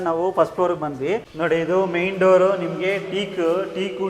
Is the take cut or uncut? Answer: cut